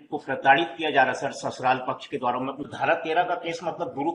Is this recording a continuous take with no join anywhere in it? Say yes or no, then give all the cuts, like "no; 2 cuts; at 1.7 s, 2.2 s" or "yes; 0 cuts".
no; 1 cut; at 2.7 s